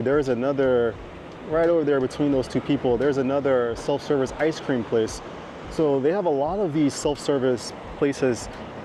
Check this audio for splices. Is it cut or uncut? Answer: uncut